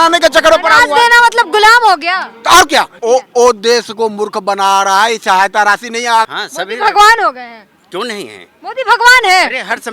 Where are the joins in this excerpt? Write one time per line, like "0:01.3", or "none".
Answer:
0:02.9
0:06.3